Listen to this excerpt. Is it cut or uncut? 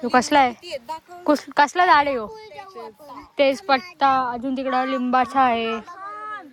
uncut